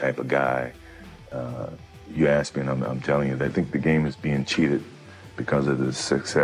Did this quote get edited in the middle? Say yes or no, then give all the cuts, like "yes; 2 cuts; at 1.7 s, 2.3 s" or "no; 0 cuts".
no; 0 cuts